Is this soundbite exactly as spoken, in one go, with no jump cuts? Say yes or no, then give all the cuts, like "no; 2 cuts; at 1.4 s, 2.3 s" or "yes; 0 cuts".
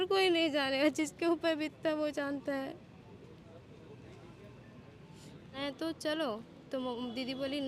no; 1 cut; at 5.6 s